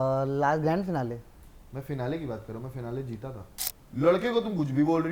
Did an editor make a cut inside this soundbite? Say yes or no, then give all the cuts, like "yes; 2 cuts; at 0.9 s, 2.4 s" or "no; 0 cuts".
yes; 1 cut; at 3.5 s